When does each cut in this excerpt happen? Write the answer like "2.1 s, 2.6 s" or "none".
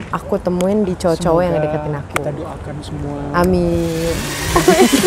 none